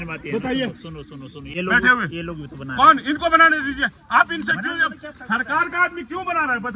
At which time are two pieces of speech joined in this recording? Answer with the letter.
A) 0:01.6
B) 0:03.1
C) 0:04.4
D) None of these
A